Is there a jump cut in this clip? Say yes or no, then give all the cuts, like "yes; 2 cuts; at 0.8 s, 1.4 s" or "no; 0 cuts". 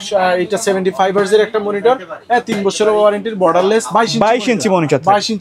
no; 0 cuts